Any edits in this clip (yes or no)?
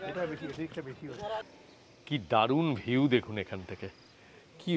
yes